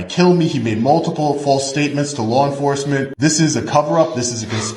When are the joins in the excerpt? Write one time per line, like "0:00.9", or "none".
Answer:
0:03.1